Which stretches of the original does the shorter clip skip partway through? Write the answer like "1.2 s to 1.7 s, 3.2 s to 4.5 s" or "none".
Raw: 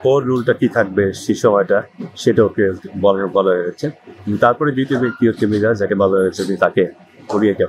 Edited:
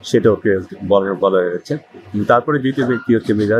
none